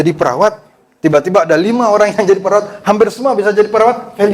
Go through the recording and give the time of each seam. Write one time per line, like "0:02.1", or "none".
none